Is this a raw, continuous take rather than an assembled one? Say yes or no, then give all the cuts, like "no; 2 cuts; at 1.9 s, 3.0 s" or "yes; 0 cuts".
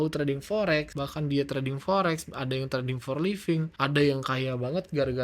no; 2 cuts; at 1.0 s, 3.7 s